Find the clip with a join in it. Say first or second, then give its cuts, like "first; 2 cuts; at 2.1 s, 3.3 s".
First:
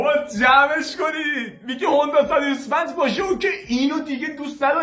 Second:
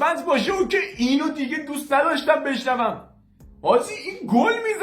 second; 1 cut; at 3.1 s